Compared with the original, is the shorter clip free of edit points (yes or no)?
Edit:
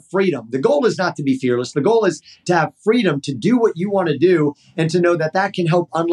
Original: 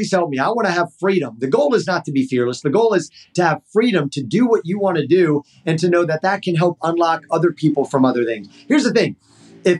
yes